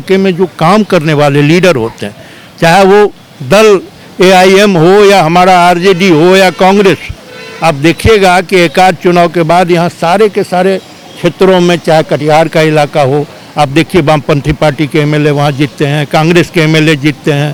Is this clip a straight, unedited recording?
yes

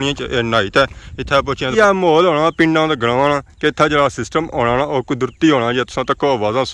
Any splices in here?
yes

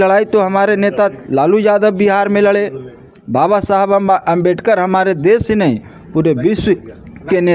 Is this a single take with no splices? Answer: yes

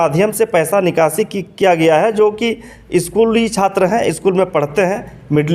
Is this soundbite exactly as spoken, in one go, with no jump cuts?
yes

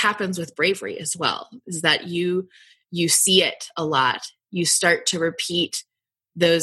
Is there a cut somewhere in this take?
no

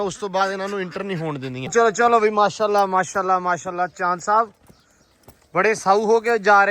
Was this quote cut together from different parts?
yes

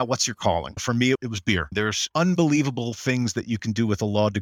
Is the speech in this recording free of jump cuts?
no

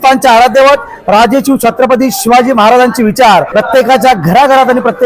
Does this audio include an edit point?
yes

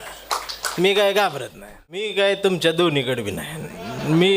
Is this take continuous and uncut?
no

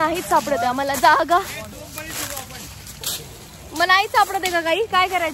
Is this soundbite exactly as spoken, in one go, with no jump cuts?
yes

